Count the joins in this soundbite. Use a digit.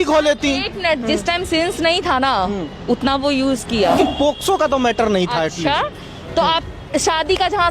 1